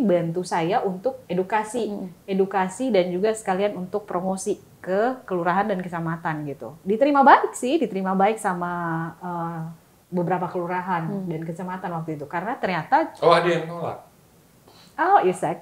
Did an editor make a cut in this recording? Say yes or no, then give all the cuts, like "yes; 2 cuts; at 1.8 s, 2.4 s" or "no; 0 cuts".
yes; 2 cuts; at 1.2 s, 6.7 s